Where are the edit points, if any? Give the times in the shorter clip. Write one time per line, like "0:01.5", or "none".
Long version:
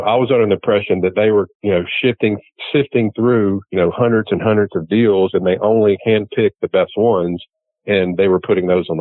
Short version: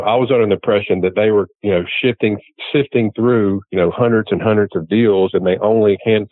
none

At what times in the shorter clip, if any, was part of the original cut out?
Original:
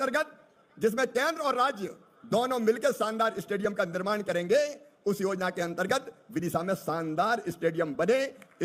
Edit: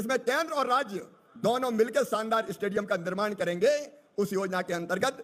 none

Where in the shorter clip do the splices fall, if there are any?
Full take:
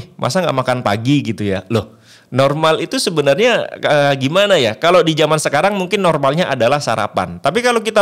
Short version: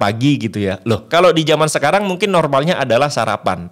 0:01.1

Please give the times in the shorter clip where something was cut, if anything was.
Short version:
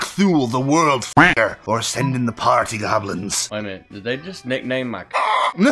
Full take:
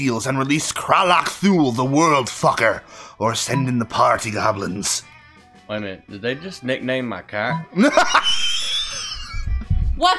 0:01.2
0:03.4

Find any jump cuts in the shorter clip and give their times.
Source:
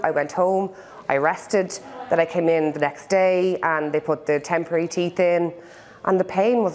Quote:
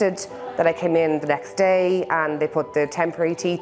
none

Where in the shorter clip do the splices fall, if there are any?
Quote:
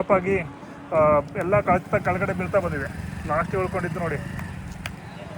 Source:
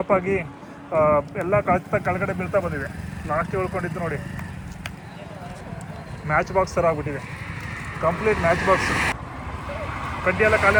none

